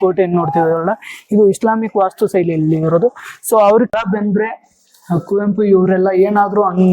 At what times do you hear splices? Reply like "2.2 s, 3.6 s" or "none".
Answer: 3.9 s